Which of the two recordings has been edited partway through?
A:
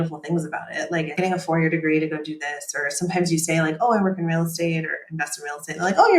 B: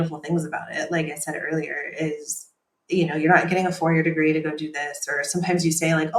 A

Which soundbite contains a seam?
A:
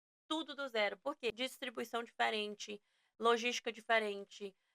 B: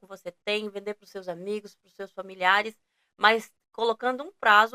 A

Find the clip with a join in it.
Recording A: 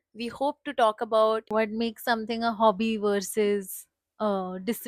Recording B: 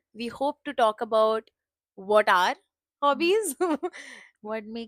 A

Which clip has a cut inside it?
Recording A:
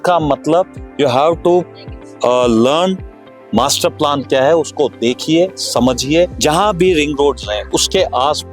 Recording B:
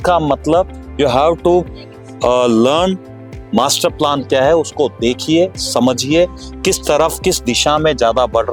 A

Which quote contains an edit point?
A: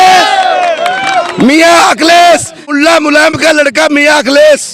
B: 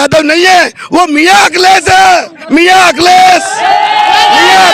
A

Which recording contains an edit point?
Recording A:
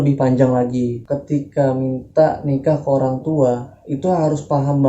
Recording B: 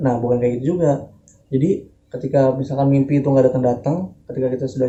A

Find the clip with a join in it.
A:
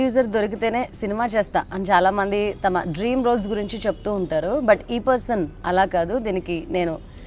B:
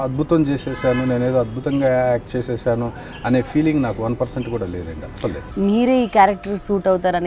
B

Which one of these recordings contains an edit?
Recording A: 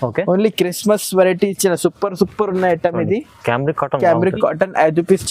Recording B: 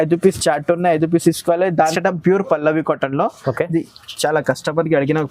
B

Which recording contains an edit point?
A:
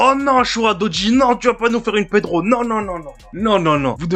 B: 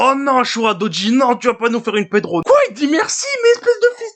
B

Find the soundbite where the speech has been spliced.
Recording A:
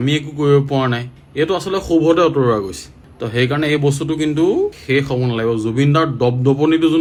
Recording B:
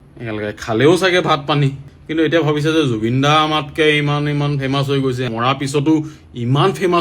B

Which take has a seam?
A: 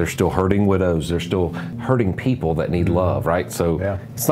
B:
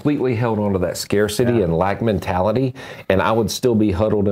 A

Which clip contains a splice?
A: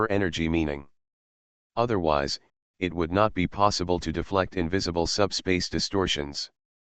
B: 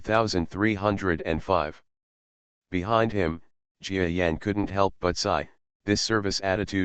B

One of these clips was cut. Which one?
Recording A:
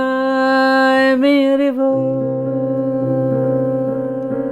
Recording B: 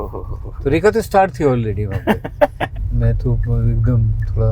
B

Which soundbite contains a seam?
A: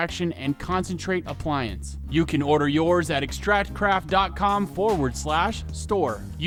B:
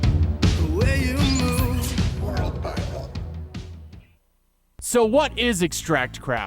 B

